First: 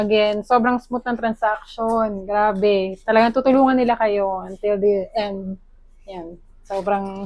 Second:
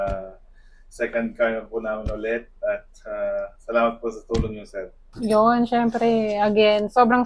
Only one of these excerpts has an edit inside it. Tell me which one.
second; 1 cut; at 5.1 s

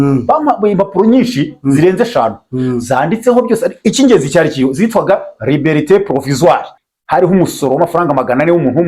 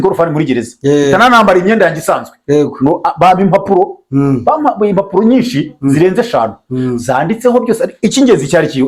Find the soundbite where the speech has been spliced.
first; 1 cut; at 6.7 s

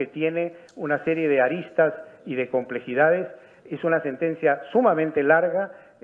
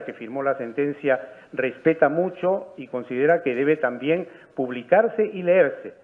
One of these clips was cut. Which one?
second; 1 cut; at 2.8 s

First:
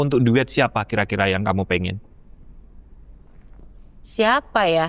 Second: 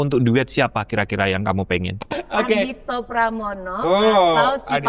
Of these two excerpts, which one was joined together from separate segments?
second; 1 cut; at 2.0 s

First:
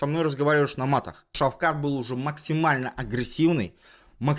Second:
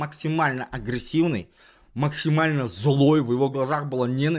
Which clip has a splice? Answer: first; 1 cut; at 1.3 s

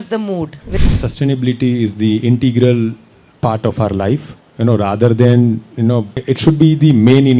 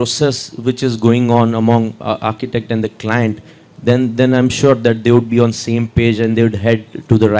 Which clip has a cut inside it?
first; 2 cuts; at 0.8 s, 6.1 s

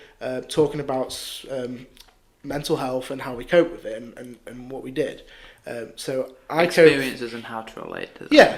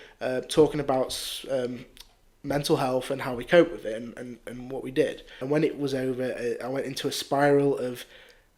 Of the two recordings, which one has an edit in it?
second; 1 cut; at 5.4 s

